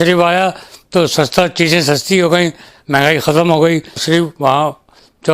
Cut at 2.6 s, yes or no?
no